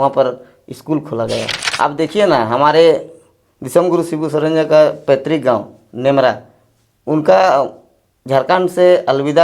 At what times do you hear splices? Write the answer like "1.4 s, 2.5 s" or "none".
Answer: 1.6 s